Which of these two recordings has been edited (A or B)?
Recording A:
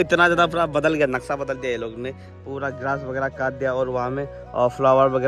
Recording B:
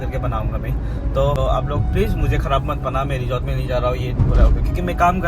B